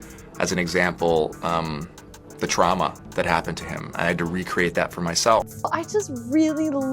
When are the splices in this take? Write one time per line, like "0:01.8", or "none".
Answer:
0:05.5